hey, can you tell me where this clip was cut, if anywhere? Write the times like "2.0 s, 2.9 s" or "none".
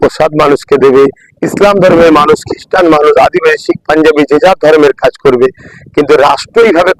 none